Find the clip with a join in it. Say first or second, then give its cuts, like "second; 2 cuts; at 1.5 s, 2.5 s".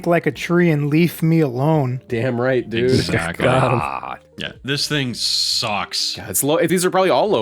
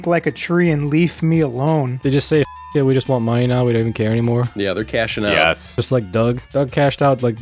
second; 2 cuts; at 1.9 s, 5.7 s